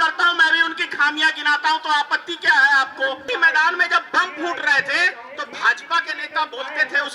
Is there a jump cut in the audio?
yes; 2 cuts; at 3.2 s, 5.2 s

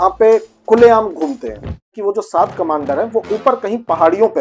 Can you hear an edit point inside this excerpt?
yes; 1 cut; at 2.0 s

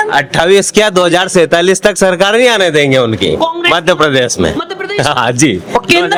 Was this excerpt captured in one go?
yes; 0 cuts

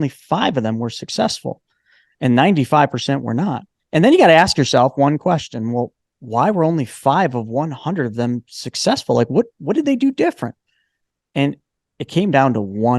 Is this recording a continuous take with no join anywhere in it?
no; 1 cut; at 3.7 s

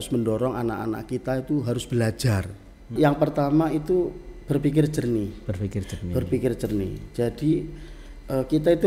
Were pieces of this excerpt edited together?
yes; 1 cut; at 2.9 s

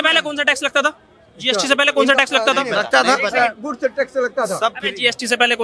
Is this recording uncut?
yes; 0 cuts

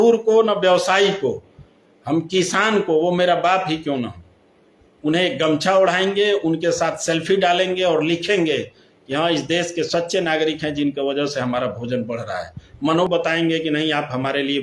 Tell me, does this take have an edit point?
yes; 1 cut; at 13.1 s

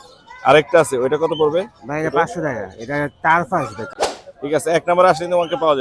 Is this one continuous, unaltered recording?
no; 1 cut; at 3.8 s

